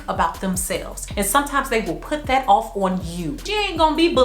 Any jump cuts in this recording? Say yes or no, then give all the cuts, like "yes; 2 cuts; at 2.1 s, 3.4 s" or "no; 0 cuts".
yes; 1 cut; at 1.0 s